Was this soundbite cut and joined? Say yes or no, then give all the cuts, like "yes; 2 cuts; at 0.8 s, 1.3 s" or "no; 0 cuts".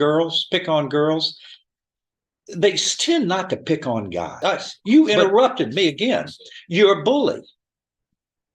yes; 1 cut; at 4.3 s